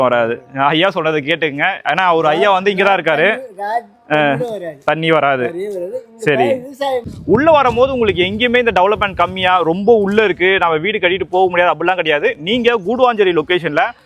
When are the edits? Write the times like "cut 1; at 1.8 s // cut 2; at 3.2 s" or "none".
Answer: cut 1; at 7.1 s

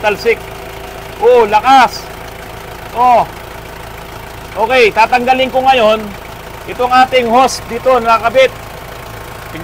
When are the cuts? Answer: none

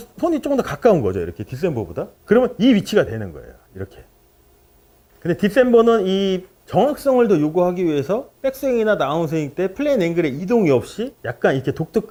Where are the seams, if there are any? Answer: none

